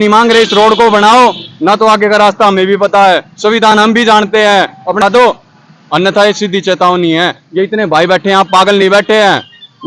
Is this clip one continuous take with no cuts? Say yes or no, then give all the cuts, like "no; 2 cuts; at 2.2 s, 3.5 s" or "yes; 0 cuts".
no; 1 cut; at 5.0 s